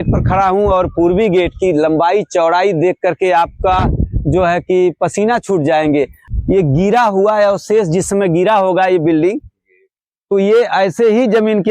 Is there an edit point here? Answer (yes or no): yes